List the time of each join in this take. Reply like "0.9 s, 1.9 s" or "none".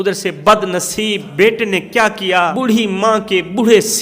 1.2 s, 2.5 s